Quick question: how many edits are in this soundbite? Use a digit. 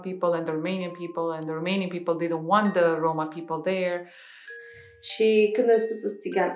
1